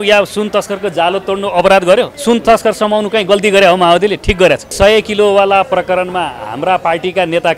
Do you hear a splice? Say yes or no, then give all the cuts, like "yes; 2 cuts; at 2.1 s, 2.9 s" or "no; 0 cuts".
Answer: yes; 2 cuts; at 2.1 s, 4.7 s